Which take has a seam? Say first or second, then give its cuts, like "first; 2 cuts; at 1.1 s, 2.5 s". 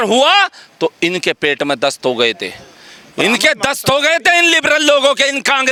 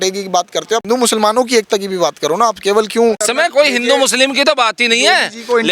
second; 2 cuts; at 0.8 s, 3.2 s